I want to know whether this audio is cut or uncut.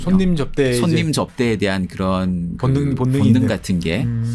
uncut